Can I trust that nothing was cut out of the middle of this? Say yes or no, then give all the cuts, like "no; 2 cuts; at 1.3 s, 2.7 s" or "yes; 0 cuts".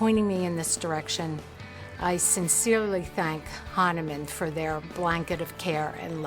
yes; 0 cuts